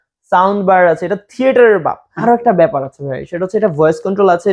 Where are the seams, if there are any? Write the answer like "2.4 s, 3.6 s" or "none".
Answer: 2.1 s